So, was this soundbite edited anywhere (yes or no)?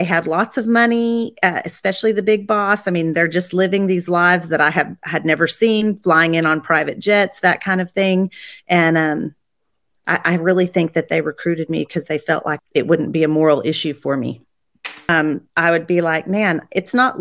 yes